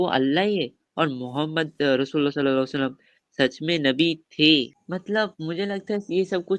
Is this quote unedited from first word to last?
no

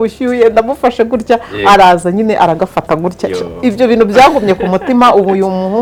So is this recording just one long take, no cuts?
yes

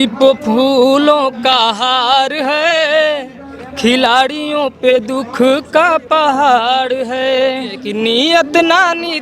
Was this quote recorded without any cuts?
no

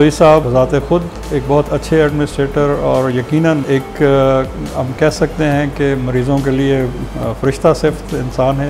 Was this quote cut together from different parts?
no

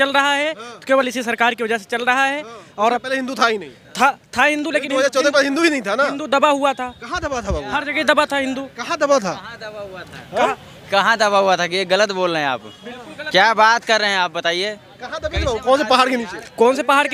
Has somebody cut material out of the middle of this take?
no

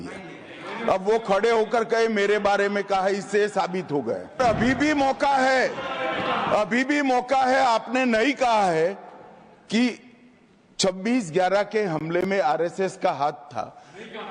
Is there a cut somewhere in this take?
yes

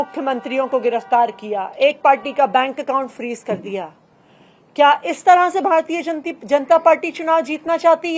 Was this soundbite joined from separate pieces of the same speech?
no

